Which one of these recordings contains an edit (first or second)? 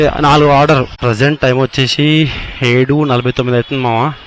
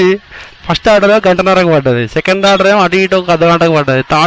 first